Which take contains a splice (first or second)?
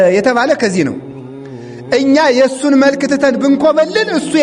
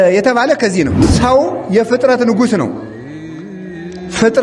second